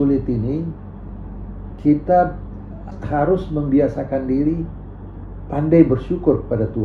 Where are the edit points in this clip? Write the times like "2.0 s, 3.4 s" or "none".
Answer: 2.9 s